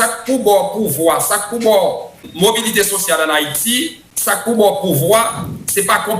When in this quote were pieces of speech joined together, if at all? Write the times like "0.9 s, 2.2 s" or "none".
2.2 s, 4.1 s